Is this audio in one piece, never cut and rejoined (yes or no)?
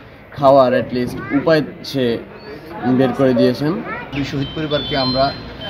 no